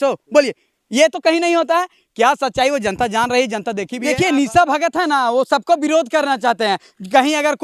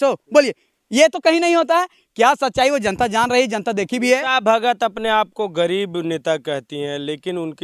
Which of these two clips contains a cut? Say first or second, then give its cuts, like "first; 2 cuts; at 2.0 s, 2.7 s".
first; 1 cut; at 3.9 s